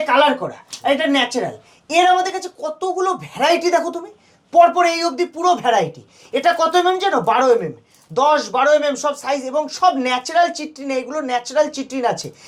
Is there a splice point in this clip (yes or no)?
no